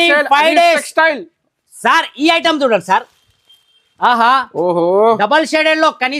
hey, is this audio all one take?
yes; 0 cuts

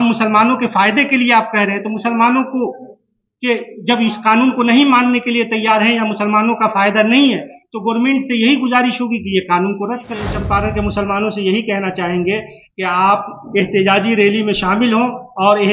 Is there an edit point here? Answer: yes; 1 cut; at 10.3 s

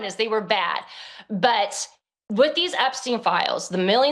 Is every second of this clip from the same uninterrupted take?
yes; 0 cuts

